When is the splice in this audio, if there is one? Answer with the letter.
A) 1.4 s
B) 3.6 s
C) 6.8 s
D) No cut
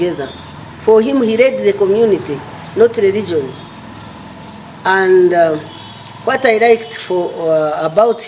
D